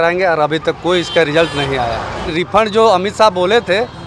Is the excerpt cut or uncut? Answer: uncut